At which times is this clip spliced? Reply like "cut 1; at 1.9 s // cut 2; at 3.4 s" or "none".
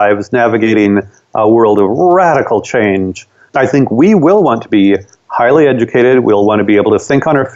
none